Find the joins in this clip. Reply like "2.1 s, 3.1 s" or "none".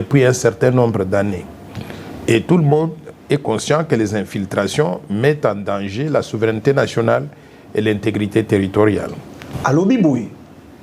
9.4 s